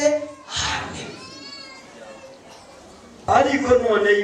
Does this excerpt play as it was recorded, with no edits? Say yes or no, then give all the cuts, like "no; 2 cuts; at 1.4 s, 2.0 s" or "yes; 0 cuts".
no; 1 cut; at 3.1 s